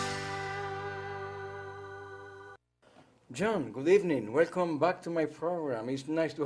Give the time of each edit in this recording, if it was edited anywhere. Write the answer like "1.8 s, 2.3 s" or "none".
2.0 s